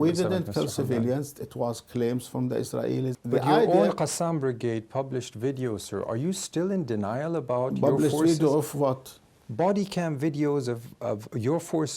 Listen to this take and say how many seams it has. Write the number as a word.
one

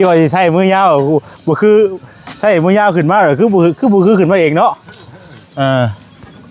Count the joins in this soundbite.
zero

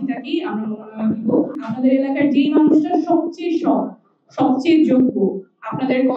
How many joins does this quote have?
one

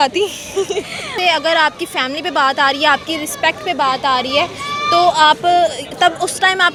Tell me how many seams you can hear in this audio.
zero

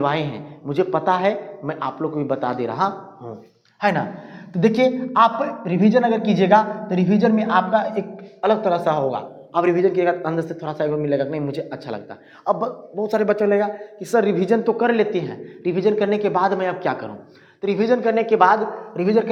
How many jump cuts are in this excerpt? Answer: zero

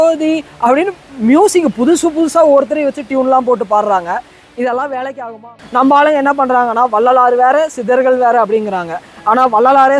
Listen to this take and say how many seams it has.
one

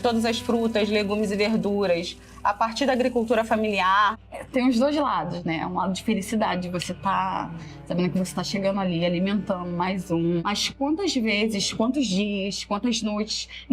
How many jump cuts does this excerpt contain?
two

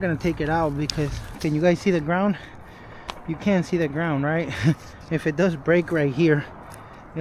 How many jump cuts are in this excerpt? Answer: one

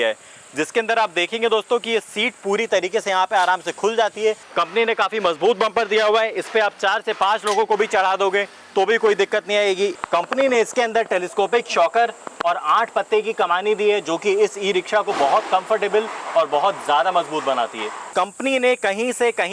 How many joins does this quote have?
three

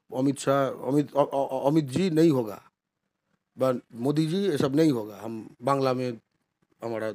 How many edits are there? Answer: zero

